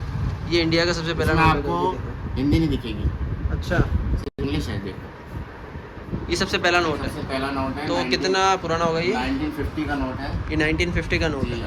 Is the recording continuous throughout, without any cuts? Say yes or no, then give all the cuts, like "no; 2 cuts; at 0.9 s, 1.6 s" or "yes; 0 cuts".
yes; 0 cuts